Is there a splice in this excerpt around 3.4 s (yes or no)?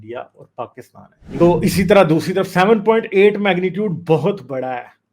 no